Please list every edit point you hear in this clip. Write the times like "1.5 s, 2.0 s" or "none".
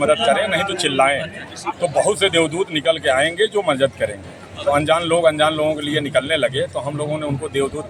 none